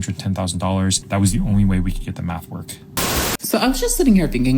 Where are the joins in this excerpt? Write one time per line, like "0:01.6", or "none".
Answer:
0:01.0
0:03.1